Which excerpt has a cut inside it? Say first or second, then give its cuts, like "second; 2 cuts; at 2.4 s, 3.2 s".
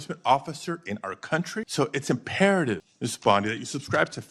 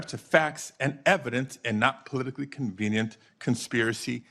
first; 2 cuts; at 1.7 s, 2.9 s